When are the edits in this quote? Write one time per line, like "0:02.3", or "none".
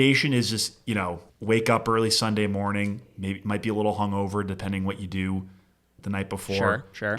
0:01.3